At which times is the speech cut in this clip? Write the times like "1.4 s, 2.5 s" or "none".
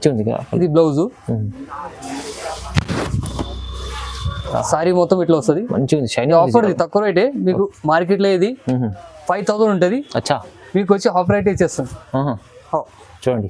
none